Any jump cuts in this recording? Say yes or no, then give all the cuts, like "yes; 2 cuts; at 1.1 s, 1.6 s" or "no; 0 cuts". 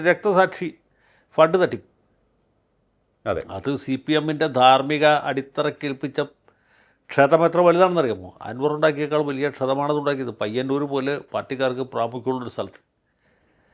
no; 0 cuts